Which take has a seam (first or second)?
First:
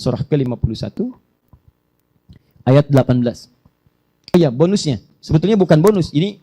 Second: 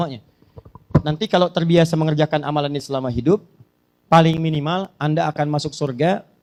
first